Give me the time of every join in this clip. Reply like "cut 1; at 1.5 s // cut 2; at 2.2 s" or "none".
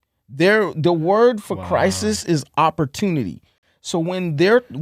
none